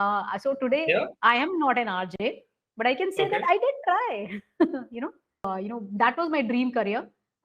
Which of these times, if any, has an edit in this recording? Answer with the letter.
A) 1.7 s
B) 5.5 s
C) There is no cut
B